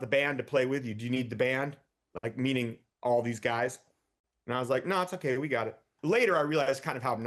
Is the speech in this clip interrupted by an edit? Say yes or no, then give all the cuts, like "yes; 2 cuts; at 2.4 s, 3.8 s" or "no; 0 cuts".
yes; 1 cut; at 5.9 s